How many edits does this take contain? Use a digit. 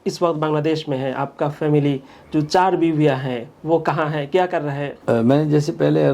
0